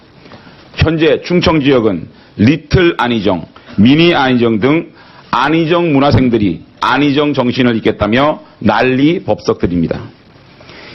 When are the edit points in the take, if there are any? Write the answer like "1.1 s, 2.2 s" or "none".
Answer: none